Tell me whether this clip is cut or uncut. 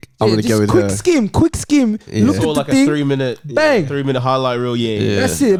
uncut